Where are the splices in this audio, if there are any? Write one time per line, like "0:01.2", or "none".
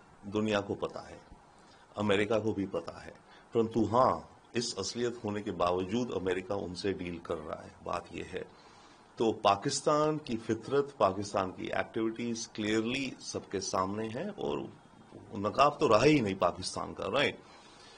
none